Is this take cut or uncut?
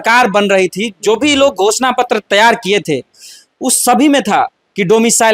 uncut